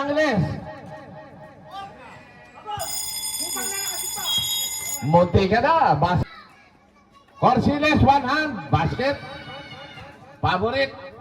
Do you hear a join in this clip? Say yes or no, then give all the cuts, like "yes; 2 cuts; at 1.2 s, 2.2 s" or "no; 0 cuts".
yes; 1 cut; at 6.2 s